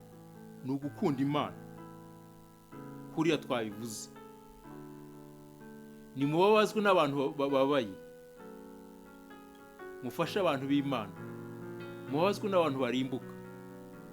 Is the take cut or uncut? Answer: cut